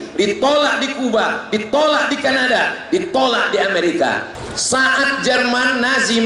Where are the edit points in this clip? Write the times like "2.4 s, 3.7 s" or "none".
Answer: 4.4 s

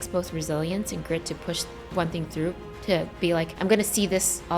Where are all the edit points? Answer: 3.5 s

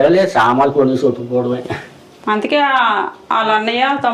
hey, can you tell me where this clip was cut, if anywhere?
none

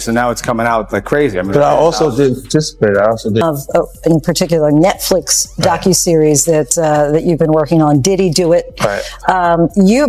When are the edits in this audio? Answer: 3.4 s

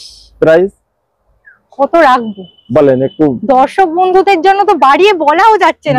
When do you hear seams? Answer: none

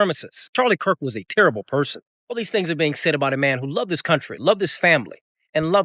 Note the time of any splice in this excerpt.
none

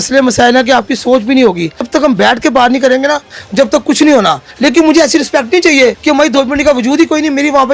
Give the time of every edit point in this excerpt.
1.8 s, 4.5 s, 6.0 s

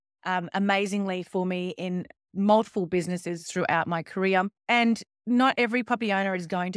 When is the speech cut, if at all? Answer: 4.6 s

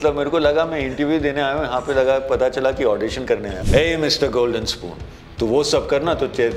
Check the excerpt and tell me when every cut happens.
3.5 s

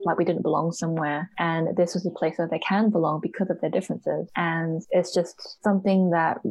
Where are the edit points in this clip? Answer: 1.3 s, 4.6 s, 5.4 s

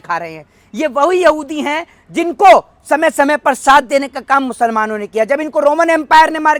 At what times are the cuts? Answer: none

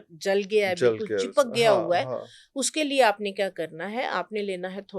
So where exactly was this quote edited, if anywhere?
none

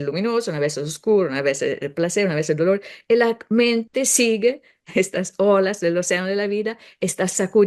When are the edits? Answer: none

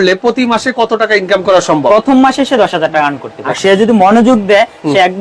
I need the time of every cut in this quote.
1.9 s, 3.5 s

